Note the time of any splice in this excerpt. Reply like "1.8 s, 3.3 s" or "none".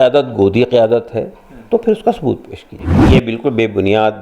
3.0 s